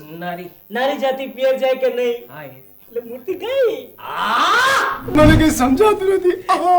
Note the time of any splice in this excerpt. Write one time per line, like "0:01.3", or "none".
0:05.0